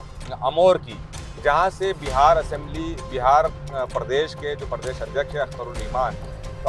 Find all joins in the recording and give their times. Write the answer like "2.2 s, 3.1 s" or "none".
none